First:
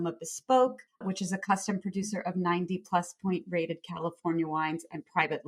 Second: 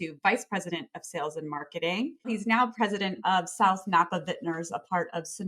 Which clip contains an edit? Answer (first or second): second